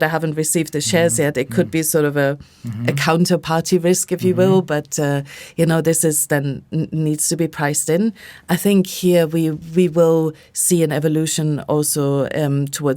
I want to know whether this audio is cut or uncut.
uncut